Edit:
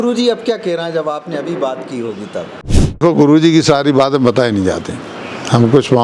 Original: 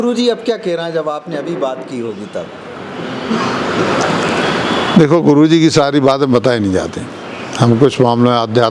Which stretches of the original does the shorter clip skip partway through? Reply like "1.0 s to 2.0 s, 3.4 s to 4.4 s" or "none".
3.0 s to 5.1 s